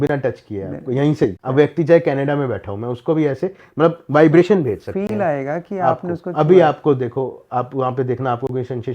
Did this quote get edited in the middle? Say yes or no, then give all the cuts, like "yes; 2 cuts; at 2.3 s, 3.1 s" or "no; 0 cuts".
yes; 1 cut; at 1.4 s